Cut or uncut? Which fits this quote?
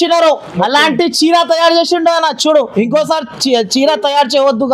uncut